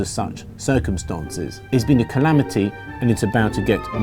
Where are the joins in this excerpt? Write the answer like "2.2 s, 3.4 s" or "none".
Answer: 1.5 s